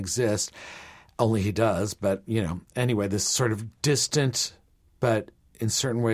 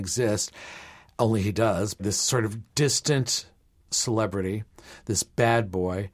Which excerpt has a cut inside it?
second; 2 cuts; at 2.0 s, 3.8 s

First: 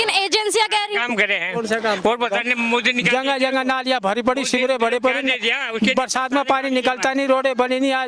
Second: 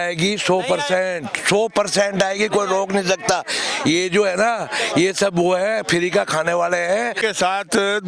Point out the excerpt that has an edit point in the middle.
second; 1 cut; at 7.1 s

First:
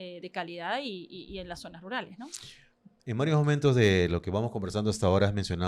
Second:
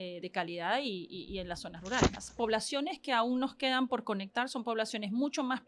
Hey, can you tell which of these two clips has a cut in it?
second; 1 cut; at 2.2 s

